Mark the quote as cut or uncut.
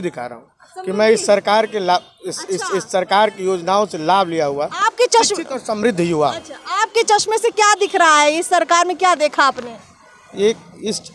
uncut